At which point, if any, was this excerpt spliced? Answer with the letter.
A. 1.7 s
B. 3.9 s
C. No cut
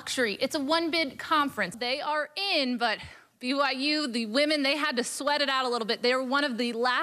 A